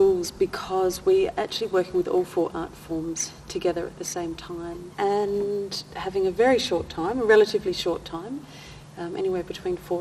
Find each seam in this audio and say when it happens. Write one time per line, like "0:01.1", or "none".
0:04.9